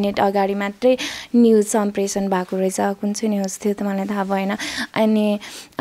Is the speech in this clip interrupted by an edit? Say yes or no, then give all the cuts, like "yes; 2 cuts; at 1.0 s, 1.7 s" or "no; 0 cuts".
no; 0 cuts